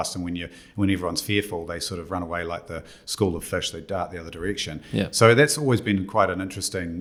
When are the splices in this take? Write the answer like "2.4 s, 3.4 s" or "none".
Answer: none